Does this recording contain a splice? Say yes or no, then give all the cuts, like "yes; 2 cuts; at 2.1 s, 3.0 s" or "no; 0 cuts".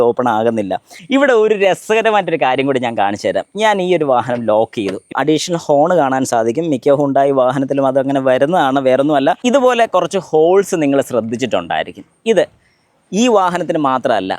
yes; 3 cuts; at 0.9 s, 5.1 s, 9.4 s